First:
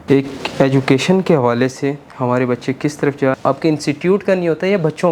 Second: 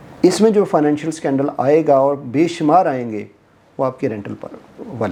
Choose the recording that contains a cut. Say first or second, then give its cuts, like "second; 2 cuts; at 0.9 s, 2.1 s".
first; 1 cut; at 3.4 s